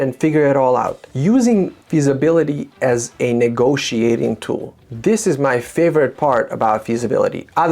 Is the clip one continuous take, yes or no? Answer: no